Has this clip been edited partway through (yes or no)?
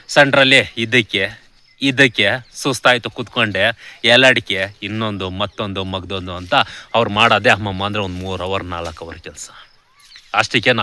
no